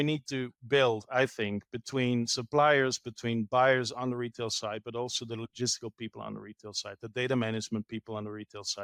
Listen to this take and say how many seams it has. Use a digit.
0